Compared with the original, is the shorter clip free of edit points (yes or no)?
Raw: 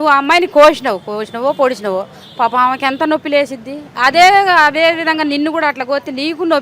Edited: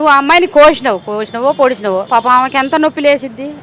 no